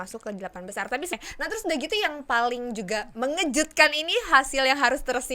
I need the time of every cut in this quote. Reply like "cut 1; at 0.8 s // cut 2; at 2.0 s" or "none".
cut 1; at 1.1 s